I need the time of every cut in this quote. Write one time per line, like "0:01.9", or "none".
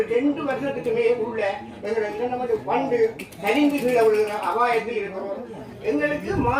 0:05.7